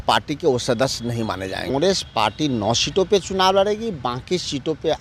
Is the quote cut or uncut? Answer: cut